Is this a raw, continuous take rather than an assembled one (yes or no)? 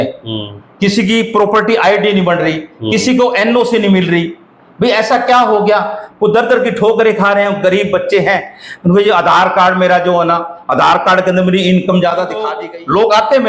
no